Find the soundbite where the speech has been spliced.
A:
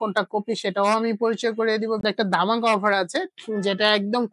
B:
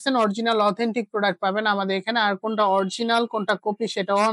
A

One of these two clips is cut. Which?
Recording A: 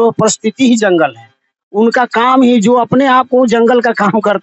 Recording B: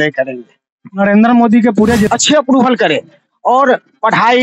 B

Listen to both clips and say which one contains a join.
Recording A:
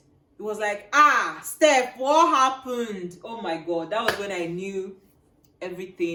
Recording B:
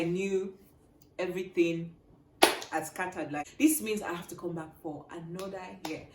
B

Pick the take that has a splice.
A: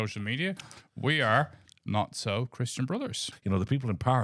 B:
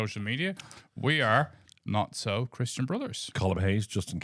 A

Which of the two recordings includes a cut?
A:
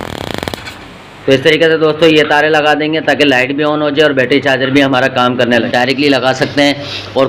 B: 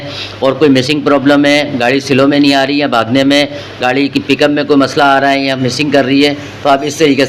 A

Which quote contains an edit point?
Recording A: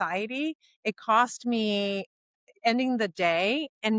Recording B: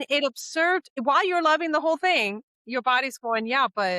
B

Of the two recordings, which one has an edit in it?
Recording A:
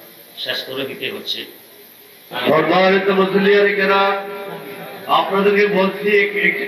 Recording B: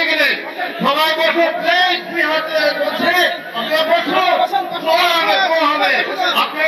A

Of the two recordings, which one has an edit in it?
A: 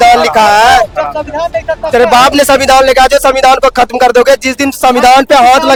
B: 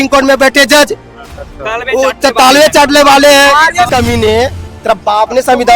B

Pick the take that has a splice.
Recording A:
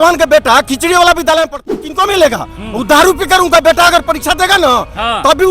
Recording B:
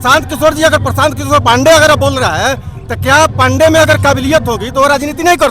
A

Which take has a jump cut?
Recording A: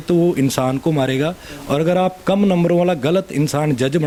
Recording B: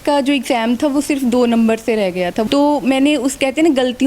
B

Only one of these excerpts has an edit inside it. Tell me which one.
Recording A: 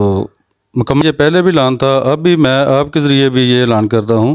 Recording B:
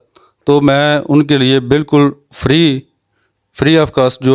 A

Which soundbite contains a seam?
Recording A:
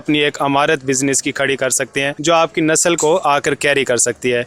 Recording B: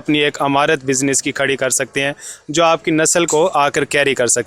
A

